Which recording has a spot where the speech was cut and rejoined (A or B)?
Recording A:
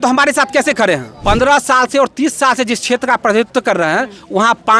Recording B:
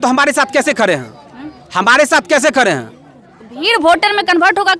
A